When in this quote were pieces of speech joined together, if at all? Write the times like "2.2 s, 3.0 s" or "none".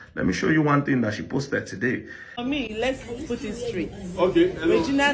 2.3 s